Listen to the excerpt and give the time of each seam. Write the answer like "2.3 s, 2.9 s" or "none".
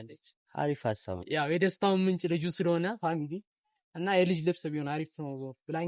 none